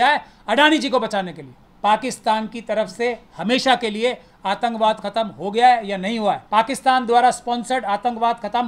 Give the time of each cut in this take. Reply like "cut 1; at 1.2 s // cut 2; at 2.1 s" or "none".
cut 1; at 1.6 s // cut 2; at 6.4 s